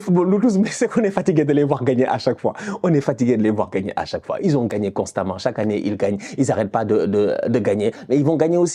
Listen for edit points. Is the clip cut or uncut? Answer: uncut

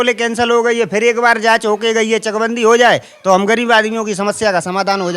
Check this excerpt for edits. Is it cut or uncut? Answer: uncut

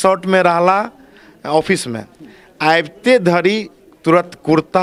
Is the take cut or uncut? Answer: uncut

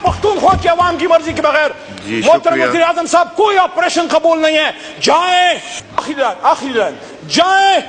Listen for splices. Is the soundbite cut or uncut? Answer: cut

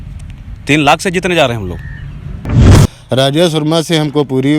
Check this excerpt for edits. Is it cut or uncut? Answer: cut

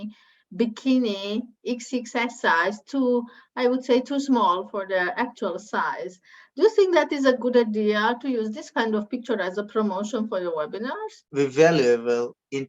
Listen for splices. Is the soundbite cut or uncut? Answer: cut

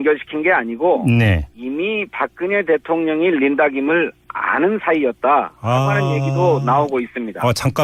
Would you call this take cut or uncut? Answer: uncut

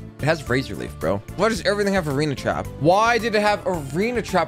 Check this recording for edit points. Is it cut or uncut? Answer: cut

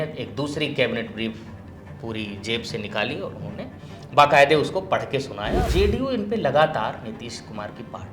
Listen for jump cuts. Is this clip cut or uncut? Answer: cut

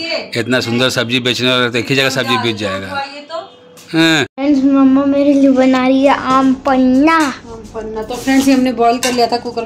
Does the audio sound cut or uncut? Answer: cut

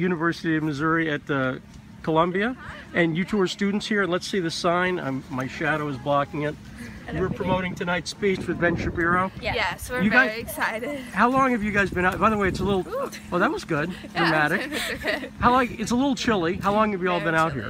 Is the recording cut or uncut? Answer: uncut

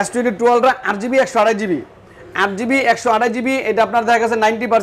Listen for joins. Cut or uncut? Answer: uncut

